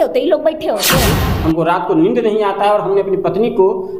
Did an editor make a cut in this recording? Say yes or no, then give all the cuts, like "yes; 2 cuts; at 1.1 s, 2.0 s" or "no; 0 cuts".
yes; 1 cut; at 1.2 s